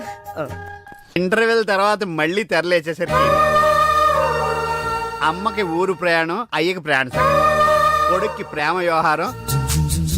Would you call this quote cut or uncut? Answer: cut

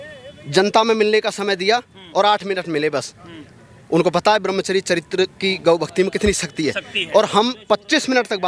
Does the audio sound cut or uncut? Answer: uncut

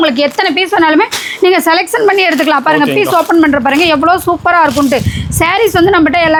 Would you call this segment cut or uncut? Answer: uncut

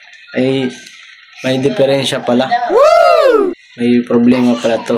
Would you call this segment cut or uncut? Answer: cut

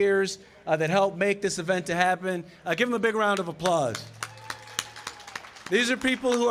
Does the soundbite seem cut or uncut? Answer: uncut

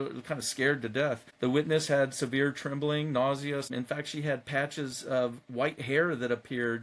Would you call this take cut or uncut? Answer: cut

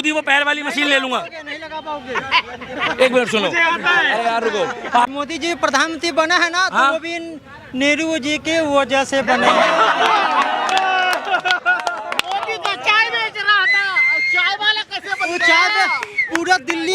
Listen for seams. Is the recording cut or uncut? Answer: cut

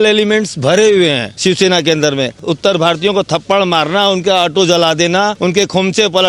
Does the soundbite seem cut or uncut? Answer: cut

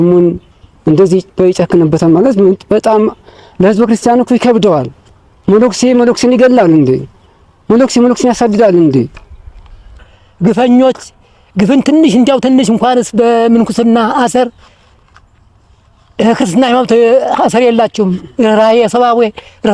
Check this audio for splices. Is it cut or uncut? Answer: cut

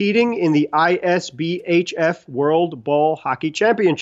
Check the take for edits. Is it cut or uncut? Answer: uncut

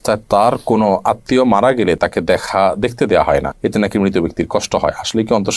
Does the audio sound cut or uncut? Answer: uncut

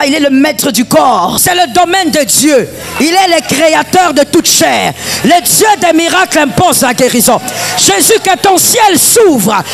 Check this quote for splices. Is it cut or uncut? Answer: cut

